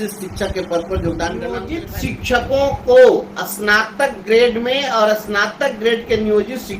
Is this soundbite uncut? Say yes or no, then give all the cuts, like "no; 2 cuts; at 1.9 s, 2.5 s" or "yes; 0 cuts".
no; 1 cut; at 1.8 s